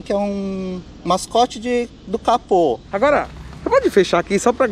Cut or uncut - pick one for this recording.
cut